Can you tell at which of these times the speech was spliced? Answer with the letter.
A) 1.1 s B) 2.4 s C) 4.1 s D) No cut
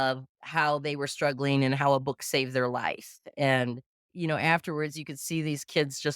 C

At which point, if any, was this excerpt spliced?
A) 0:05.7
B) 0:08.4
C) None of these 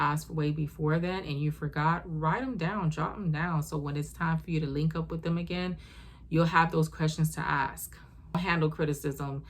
B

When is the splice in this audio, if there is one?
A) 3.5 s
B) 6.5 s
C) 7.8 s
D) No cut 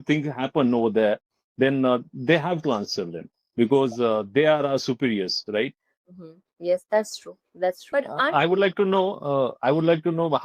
C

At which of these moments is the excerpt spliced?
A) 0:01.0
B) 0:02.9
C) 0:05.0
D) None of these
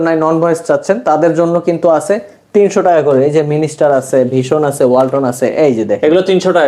D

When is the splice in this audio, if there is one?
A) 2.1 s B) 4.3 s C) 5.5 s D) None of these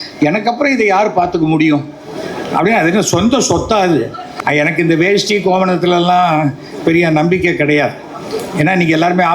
B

